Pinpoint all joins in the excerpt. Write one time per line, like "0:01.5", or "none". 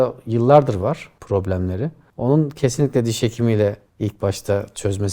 0:01.1
0:02.0